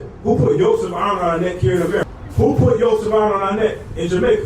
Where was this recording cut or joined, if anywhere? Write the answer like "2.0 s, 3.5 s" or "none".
2.0 s